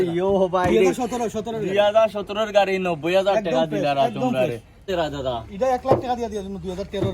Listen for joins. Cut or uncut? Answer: cut